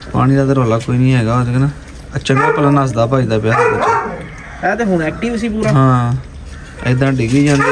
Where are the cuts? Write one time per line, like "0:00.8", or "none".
none